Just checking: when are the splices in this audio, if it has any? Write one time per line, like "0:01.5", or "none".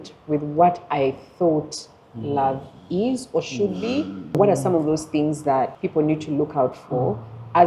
0:04.4
0:05.8